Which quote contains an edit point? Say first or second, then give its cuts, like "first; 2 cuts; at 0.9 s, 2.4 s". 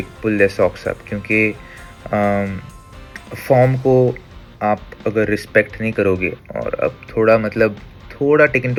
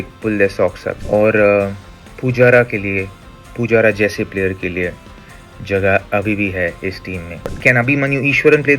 second; 2 cuts; at 0.9 s, 7.5 s